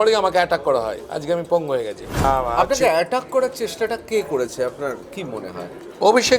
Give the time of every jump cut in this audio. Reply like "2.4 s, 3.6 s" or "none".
2.2 s